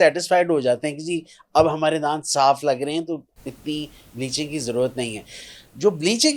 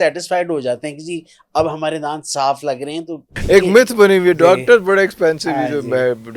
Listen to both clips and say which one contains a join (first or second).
second